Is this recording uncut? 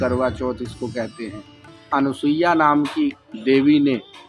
no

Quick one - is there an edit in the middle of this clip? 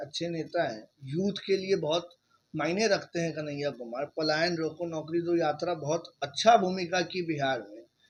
no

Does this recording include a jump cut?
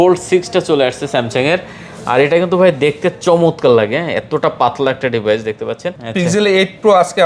yes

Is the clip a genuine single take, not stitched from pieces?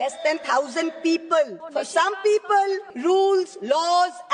no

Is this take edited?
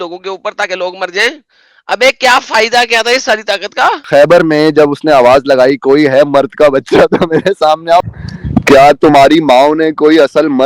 yes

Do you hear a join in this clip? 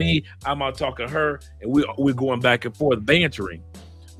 no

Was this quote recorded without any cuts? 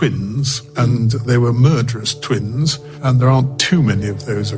no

